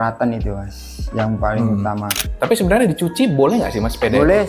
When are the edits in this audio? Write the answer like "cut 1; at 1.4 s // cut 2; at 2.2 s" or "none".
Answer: cut 1; at 2.1 s